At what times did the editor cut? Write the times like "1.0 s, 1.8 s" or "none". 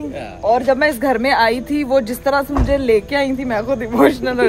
none